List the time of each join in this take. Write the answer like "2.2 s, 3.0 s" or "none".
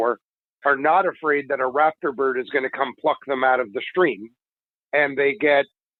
none